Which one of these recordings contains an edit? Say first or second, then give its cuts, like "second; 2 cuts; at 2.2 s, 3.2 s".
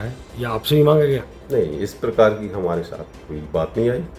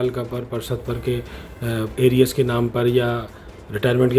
second; 1 cut; at 1.9 s